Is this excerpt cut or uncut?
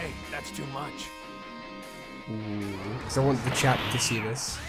cut